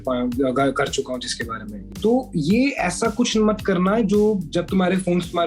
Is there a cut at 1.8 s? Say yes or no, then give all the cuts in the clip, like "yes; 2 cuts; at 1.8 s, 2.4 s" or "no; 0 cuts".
yes; 1 cut; at 1.8 s